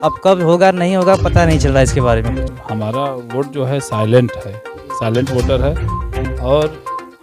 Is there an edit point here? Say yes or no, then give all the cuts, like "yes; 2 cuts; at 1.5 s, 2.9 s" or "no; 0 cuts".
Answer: yes; 1 cut; at 2.6 s